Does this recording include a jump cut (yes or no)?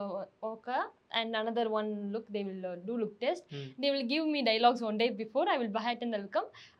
no